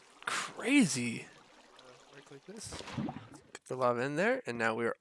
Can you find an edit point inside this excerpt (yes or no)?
yes